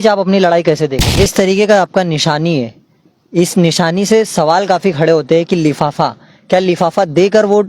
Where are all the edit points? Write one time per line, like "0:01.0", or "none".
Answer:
0:01.0